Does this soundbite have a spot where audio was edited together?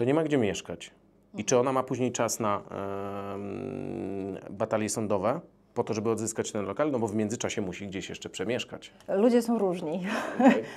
no; 0 cuts

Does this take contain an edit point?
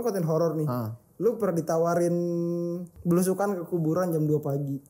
yes; 1 cut; at 2.9 s

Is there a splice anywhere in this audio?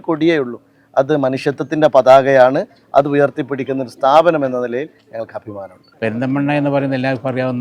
no; 0 cuts

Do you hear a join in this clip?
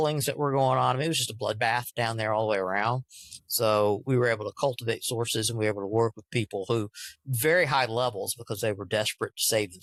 no; 0 cuts

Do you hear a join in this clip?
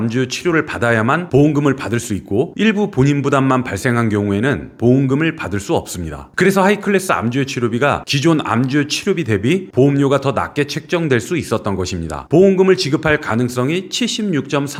no; 0 cuts

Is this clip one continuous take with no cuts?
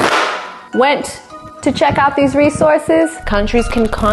no; 1 cut; at 3.2 s

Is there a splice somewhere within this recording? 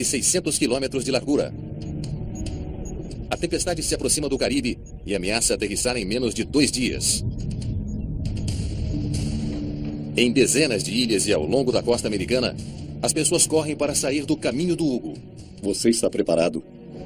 yes; 1 cut; at 4.0 s

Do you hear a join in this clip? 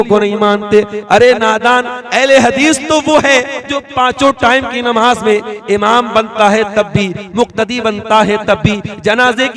no; 0 cuts

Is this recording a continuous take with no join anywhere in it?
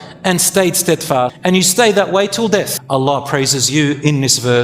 no; 2 cuts; at 1.4 s, 2.8 s

